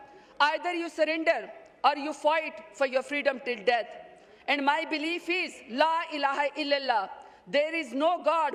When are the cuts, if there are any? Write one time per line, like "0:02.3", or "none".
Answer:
none